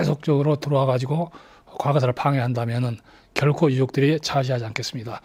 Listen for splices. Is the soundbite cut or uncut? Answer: uncut